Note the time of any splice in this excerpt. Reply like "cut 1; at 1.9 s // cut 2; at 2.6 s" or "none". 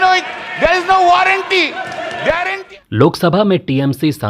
none